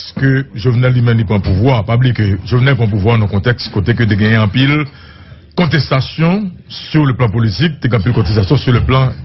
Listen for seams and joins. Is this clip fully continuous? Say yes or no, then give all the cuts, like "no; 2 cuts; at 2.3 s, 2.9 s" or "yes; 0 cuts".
no; 1 cut; at 3.8 s